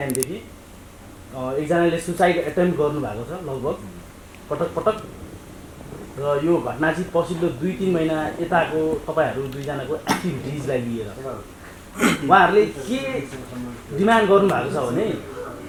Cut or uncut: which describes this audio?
uncut